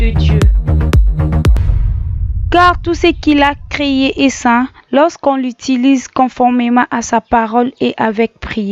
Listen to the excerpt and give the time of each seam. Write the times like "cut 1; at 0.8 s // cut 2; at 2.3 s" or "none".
cut 1; at 1.6 s